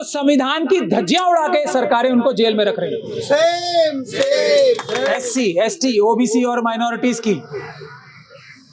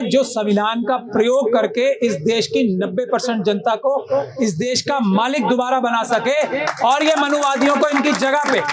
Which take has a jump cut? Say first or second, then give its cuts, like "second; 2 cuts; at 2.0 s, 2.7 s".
first; 1 cut; at 5.1 s